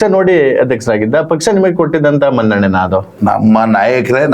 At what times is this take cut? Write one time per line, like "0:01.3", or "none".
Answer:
0:03.1